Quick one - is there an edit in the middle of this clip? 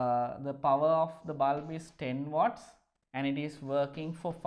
no; 0 cuts

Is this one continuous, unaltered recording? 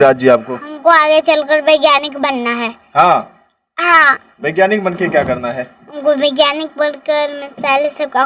yes; 0 cuts

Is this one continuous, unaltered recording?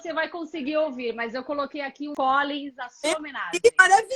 no; 1 cut; at 2.1 s

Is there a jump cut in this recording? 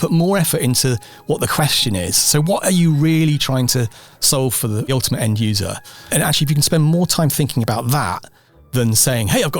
yes; 2 cuts; at 4.9 s, 6.1 s

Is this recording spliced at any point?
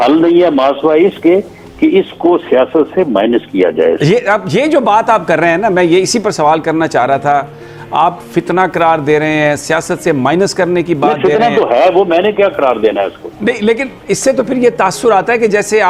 no; 0 cuts

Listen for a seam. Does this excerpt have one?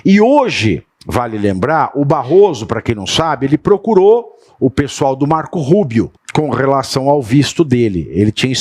yes; 2 cuts; at 0.9 s, 6.2 s

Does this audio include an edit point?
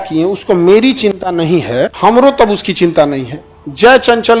no; 0 cuts

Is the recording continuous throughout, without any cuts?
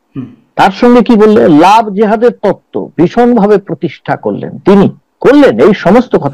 yes; 0 cuts

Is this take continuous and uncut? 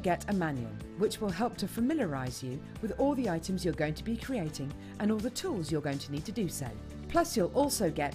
yes; 0 cuts

